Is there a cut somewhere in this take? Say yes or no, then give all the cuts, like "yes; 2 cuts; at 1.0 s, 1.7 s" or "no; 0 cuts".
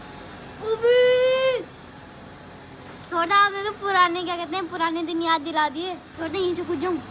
yes; 1 cut; at 6.1 s